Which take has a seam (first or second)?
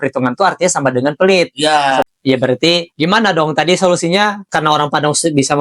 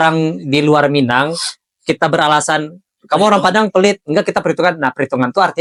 first